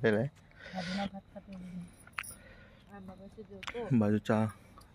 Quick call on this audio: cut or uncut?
uncut